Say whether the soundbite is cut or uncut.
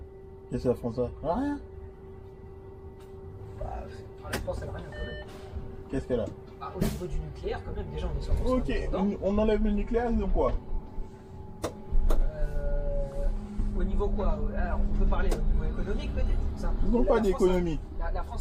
uncut